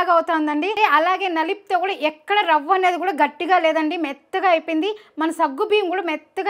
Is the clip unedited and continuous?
yes; 0 cuts

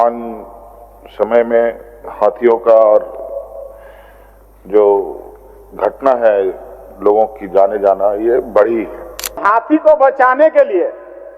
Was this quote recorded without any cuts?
no; 1 cut; at 9.4 s

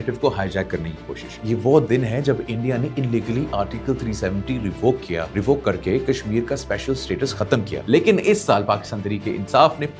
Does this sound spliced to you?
yes; 3 cuts; at 1.4 s, 5.3 s, 7.7 s

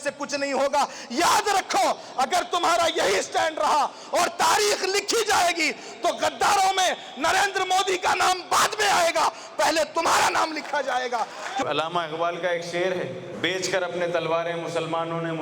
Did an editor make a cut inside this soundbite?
yes; 2 cuts; at 11.7 s, 13.2 s

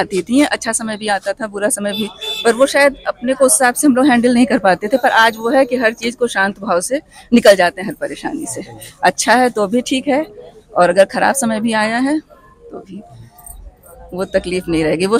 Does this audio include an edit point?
no; 0 cuts

